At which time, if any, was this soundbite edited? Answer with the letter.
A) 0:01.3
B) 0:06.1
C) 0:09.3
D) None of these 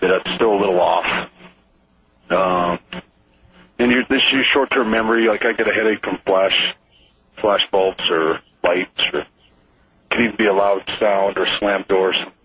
B